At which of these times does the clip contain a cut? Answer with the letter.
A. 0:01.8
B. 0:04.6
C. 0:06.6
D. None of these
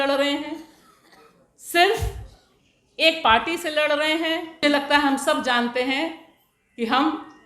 B